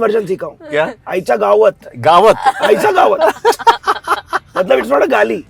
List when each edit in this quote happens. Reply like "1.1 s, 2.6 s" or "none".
none